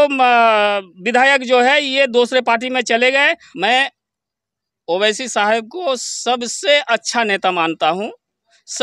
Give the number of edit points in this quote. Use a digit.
1